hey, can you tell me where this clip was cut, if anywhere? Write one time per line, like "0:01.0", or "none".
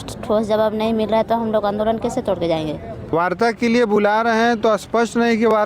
0:03.1